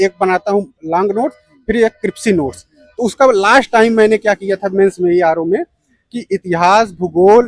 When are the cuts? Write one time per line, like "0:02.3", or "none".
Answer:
none